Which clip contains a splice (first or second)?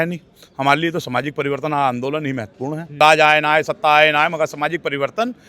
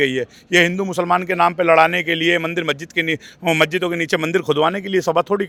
first